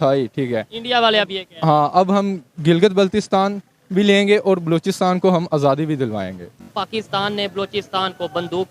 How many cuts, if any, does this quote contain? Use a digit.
1